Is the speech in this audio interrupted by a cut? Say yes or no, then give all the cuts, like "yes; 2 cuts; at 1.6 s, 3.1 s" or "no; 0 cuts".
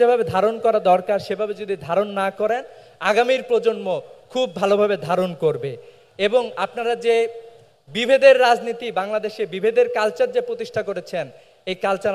no; 0 cuts